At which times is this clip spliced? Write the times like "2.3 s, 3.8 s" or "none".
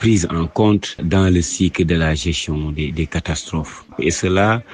1.0 s, 3.9 s